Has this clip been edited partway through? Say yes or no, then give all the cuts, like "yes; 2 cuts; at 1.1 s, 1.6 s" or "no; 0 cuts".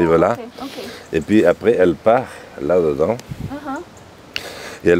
no; 0 cuts